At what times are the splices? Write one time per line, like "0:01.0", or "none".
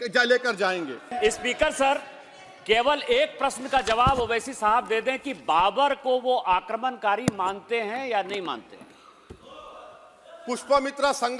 0:01.1